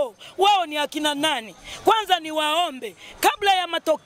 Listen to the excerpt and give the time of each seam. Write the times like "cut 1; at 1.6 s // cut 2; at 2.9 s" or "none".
none